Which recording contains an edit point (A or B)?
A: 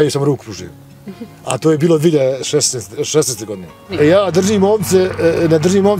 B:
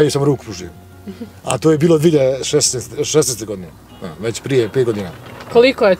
A